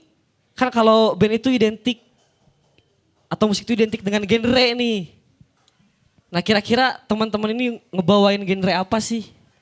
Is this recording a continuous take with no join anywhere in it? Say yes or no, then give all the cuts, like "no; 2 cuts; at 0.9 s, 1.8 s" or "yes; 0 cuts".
yes; 0 cuts